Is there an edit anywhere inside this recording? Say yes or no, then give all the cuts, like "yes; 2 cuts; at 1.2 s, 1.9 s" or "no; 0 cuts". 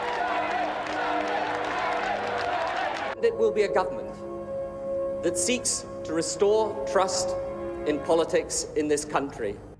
no; 0 cuts